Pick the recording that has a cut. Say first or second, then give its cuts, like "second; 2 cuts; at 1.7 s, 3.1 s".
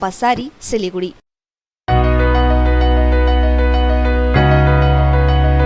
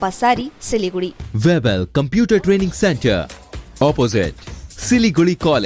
second; 1 cut; at 1.2 s